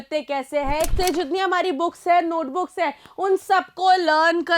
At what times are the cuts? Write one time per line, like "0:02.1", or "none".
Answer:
0:00.9